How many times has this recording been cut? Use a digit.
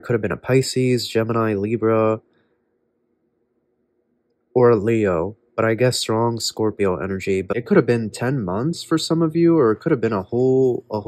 1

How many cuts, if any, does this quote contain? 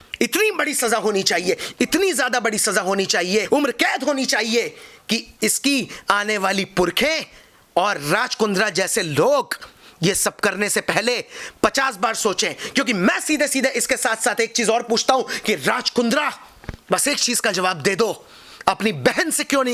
1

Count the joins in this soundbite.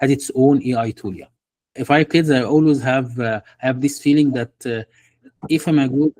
1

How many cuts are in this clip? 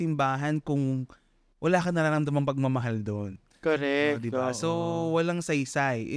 0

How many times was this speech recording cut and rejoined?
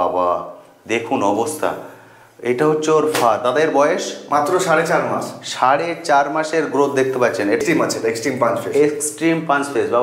1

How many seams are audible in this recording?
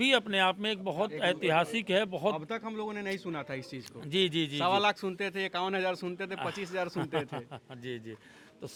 0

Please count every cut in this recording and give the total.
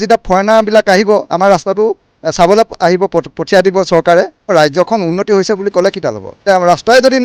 2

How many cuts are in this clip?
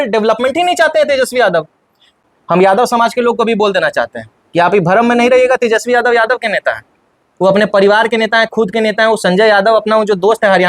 1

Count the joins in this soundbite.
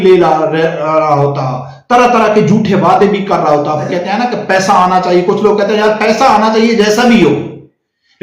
1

